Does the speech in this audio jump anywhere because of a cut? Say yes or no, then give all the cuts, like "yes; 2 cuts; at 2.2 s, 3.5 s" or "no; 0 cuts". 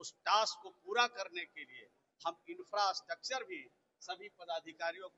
no; 0 cuts